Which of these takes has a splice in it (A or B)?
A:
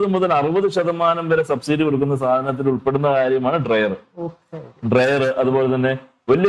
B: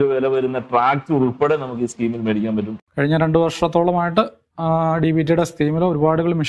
B